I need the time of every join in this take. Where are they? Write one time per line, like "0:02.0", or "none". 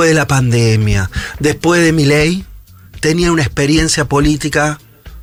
none